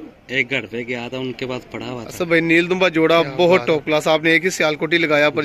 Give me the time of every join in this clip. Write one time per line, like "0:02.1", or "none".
0:02.1

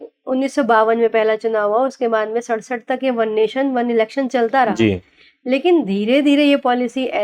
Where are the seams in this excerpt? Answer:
none

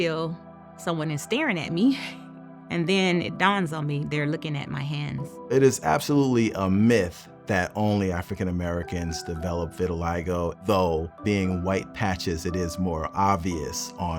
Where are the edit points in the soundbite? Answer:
0:05.3
0:10.6
0:11.1

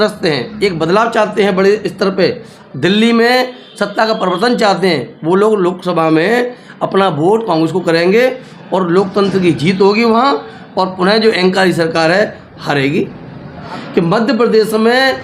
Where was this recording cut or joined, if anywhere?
0:13.7

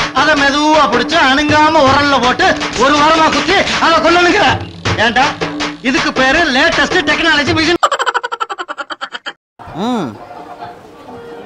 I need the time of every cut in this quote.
0:07.8
0:09.3

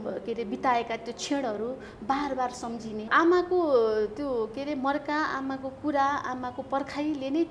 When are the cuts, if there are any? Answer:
0:03.1

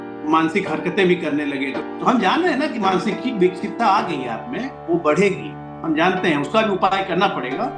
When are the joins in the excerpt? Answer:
none

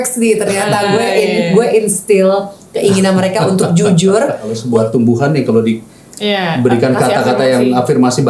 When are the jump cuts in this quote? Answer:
0:04.5

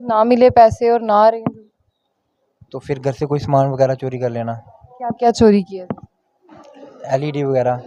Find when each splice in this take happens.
none

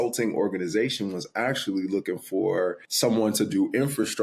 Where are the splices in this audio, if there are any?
0:02.9

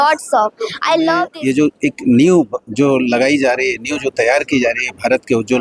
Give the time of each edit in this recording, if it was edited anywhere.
0:01.3

